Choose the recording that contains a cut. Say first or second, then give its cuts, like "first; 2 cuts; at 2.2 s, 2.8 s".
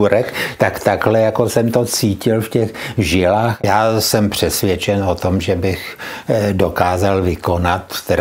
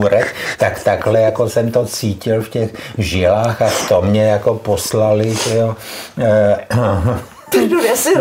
first; 1 cut; at 3.5 s